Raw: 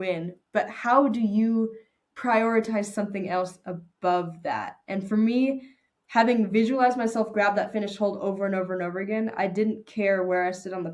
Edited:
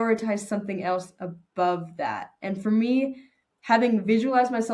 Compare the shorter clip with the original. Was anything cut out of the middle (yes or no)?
no